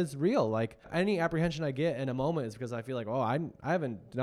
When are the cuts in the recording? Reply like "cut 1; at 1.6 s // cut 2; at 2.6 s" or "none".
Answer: cut 1; at 0.9 s